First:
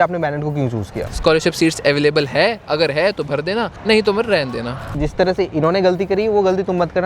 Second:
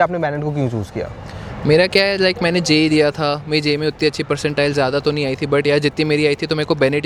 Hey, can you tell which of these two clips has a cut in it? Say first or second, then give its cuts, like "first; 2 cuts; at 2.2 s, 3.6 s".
first; 3 cuts; at 1.1 s, 3.7 s, 4.9 s